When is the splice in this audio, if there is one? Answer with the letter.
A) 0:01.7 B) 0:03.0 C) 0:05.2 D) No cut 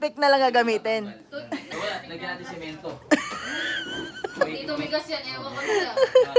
A